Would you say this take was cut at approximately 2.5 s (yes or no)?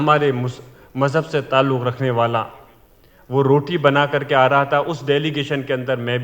no